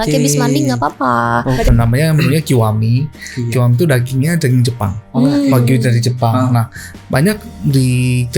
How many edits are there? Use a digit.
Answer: 1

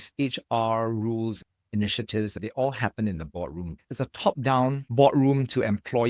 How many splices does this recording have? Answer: 1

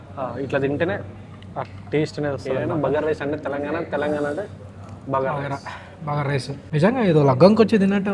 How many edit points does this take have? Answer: 2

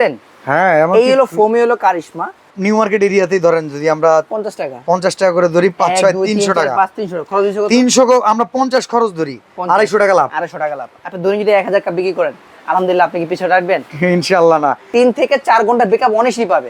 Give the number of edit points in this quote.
2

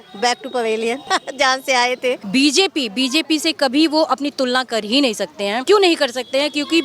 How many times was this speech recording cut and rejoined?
3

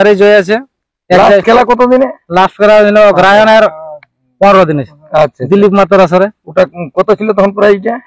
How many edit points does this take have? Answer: 0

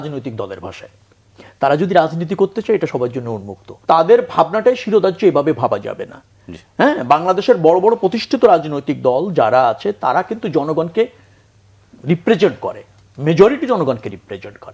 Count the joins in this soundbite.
1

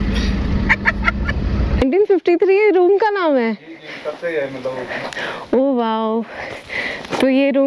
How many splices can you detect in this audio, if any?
1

